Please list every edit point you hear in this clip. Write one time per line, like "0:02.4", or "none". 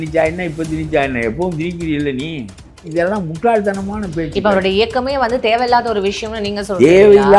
0:02.9